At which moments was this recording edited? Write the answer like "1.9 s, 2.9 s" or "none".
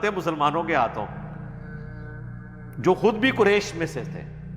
1.1 s, 2.7 s

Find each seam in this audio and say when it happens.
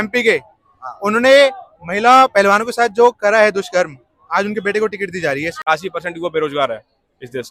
5.6 s

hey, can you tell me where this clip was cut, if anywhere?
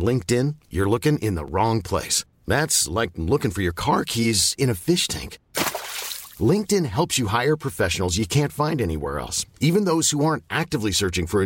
none

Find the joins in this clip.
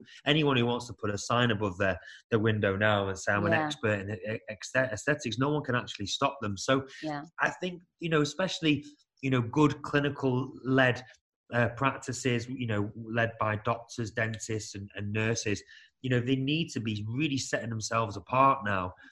none

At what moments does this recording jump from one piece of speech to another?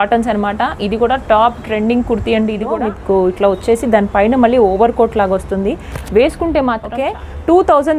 2.7 s, 6.9 s

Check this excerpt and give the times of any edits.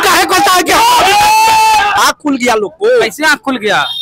2.0 s

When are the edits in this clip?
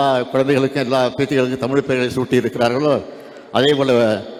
none

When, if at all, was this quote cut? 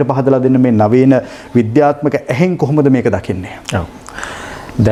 none

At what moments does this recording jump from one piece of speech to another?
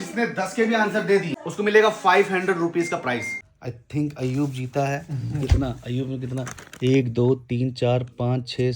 1.4 s, 3.4 s

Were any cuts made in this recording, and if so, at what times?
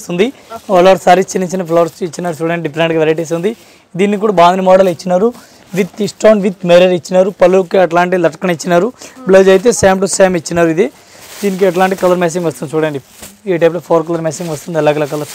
none

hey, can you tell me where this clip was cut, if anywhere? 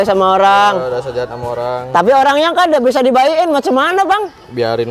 none

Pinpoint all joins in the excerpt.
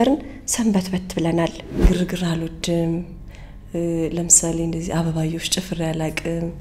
1.8 s

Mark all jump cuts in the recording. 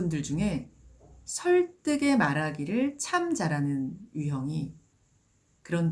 none

